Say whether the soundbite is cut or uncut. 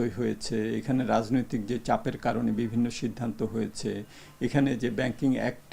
uncut